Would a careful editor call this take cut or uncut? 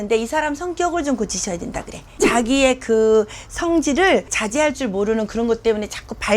cut